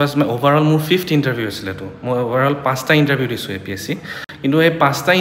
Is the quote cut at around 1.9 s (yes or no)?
no